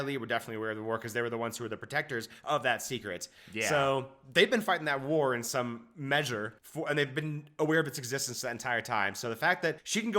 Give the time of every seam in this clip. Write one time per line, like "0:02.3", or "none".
none